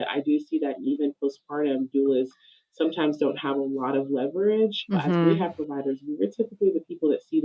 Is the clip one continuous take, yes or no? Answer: no